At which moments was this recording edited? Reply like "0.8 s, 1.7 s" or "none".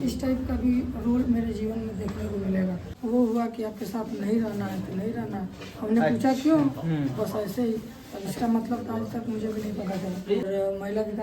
2.9 s, 10.4 s